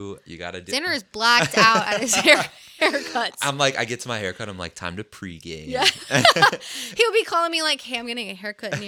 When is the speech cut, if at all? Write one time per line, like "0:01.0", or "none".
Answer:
none